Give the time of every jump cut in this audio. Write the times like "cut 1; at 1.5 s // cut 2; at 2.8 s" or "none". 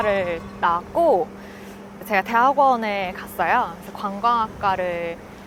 none